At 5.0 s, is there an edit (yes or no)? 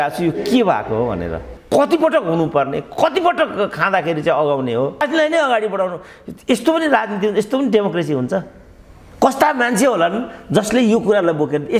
yes